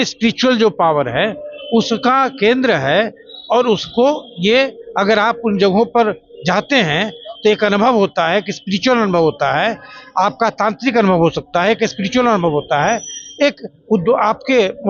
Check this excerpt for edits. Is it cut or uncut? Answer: uncut